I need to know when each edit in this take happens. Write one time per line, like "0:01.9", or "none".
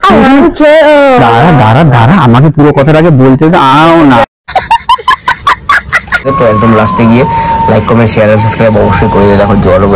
0:06.3